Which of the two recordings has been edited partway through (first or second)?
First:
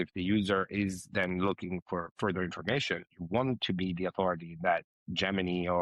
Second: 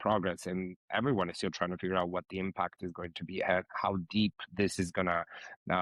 first